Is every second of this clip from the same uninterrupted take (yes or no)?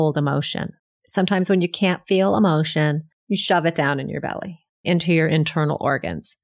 no